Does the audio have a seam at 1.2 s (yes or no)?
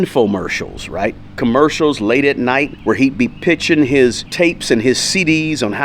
no